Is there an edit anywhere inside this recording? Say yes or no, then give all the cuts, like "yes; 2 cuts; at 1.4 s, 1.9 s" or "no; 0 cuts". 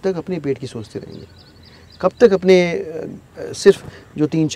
no; 0 cuts